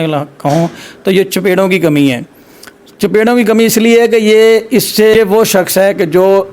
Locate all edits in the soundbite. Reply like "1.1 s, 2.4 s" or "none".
5.1 s